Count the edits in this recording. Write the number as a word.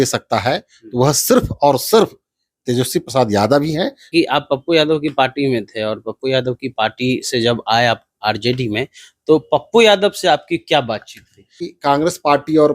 two